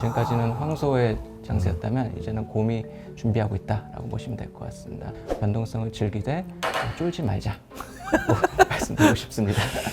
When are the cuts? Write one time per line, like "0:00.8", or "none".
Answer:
0:05.2